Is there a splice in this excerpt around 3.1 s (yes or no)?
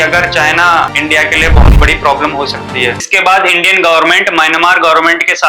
yes